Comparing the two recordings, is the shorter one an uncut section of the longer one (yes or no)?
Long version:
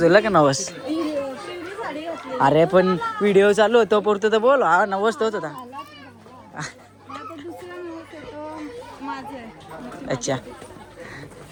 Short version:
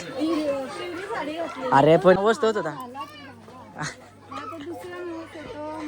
no